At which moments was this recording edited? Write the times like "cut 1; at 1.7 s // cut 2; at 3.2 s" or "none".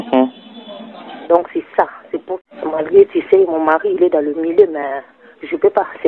cut 1; at 2.3 s